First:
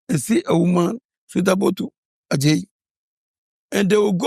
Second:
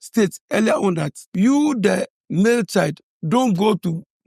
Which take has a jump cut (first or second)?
second